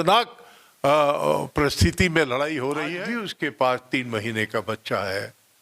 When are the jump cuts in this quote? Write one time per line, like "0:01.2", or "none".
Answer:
0:02.9